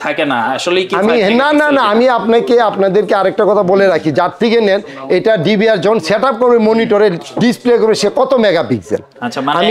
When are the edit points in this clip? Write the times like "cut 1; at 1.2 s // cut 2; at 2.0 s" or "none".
none